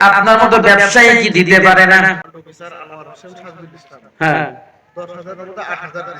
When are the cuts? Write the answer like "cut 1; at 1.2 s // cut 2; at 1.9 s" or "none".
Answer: cut 1; at 2.2 s